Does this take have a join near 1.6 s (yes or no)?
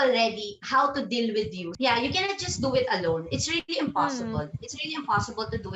yes